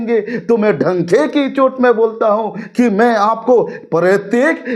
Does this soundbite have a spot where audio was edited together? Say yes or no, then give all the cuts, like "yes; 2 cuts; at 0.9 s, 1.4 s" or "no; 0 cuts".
no; 0 cuts